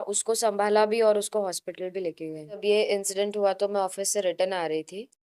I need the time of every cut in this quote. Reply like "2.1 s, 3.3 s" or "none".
2.6 s